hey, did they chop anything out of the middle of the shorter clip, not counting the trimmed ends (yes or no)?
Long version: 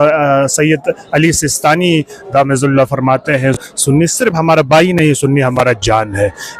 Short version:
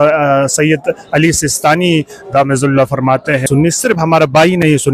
yes